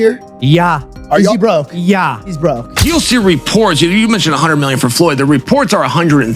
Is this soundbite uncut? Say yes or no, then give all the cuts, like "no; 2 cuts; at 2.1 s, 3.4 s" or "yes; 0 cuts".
no; 1 cut; at 2.8 s